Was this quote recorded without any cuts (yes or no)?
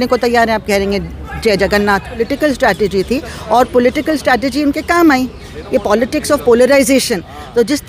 yes